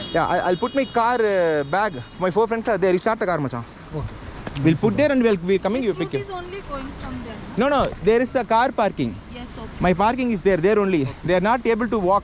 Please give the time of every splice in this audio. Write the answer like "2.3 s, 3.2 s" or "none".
none